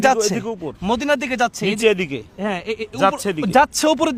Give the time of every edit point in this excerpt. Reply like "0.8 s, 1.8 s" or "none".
none